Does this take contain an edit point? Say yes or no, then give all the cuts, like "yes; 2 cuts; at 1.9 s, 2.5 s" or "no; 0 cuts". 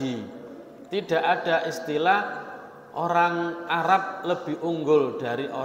no; 0 cuts